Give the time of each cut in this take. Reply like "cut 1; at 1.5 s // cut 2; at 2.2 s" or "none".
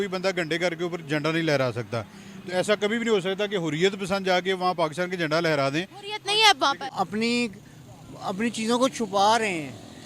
cut 1; at 6.9 s